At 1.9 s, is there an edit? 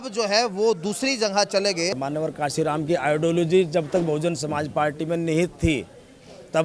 yes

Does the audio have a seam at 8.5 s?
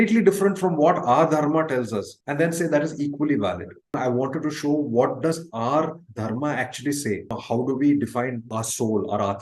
yes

